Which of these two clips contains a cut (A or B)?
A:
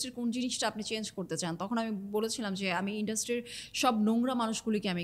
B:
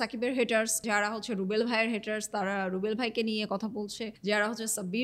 B